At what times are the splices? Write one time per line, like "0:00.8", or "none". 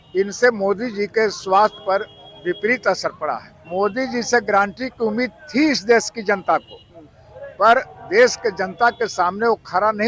0:03.5